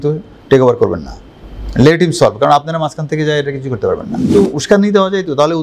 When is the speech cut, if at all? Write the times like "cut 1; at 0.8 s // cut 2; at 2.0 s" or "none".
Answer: cut 1; at 4.2 s